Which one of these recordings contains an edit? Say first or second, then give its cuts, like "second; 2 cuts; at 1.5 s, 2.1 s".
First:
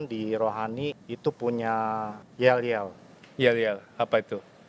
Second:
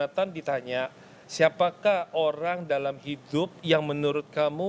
first; 2 cuts; at 1.1 s, 2.2 s